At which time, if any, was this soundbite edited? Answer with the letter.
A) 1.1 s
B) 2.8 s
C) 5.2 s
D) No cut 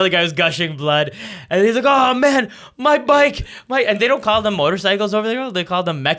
D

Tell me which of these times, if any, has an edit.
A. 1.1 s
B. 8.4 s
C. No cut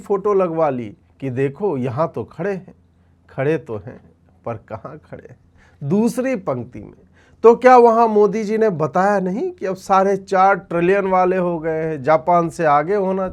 C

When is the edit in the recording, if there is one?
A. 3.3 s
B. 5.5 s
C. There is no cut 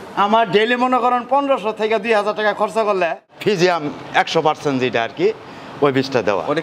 A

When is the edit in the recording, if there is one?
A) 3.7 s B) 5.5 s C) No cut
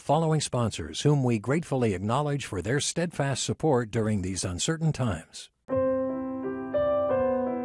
B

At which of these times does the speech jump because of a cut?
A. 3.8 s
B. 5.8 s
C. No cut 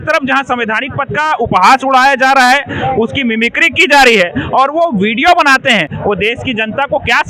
C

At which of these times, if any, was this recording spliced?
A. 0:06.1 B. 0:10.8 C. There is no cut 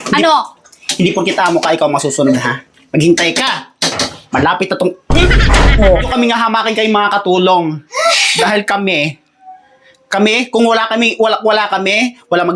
A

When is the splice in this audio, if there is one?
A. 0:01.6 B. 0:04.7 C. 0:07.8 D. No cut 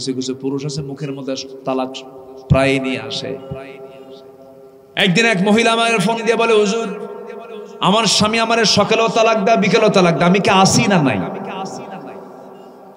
D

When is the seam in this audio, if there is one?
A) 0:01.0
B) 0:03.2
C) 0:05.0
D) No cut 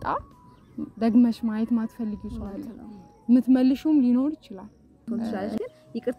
C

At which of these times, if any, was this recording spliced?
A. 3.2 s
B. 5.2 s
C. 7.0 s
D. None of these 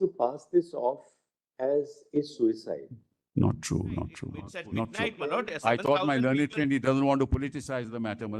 B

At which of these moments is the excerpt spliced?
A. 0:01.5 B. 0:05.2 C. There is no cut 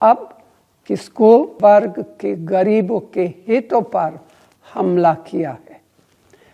A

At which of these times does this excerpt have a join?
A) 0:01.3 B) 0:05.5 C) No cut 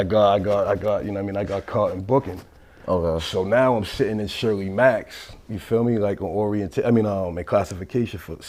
C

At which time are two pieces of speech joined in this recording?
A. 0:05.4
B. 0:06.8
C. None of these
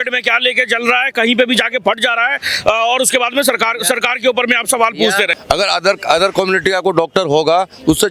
A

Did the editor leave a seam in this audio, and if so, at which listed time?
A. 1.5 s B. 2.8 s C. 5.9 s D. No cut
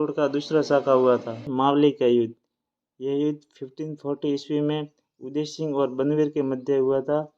A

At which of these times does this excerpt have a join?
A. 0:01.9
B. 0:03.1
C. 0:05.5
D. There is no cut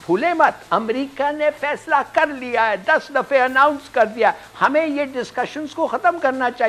D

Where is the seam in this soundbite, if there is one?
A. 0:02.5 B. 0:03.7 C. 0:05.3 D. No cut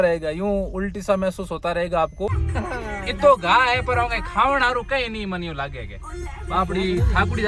A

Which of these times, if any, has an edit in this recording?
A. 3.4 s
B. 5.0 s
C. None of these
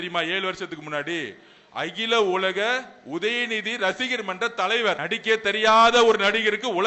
B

